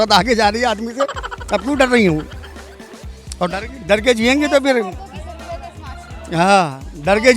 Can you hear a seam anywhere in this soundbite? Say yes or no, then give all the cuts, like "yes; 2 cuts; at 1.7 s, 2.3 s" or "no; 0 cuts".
no; 0 cuts